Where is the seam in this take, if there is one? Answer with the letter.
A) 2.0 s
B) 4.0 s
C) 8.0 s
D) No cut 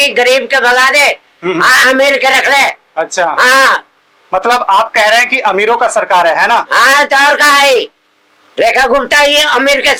D